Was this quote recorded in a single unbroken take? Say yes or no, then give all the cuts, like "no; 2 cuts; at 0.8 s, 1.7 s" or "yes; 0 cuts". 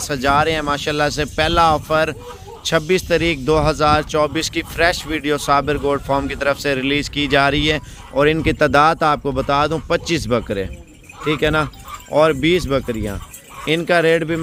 yes; 0 cuts